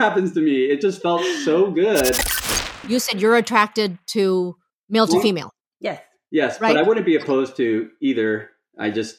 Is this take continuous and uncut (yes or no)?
no